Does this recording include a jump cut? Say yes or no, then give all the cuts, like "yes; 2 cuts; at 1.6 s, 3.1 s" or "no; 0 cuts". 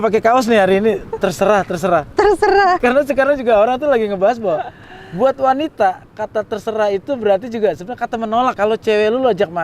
yes; 2 cuts; at 2.8 s, 8.5 s